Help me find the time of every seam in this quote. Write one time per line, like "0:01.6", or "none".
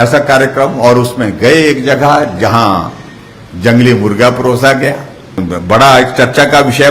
0:05.4